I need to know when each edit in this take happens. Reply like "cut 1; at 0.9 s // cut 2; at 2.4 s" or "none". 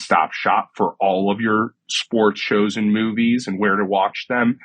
none